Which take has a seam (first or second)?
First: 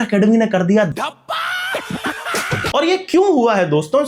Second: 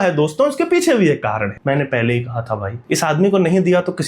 second